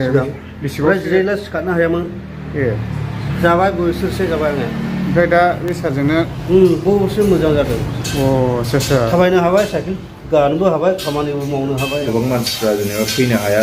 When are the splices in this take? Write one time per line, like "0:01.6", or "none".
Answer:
0:12.0